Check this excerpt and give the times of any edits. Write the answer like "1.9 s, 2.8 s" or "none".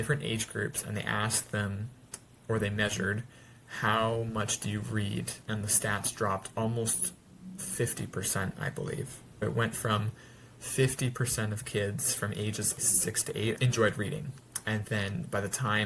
5.4 s, 9.4 s, 12.9 s